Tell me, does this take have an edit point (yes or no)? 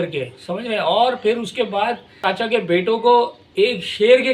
yes